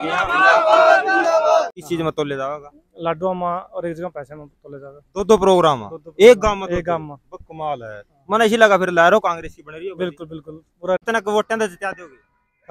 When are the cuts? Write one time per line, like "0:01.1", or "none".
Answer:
0:01.8
0:11.0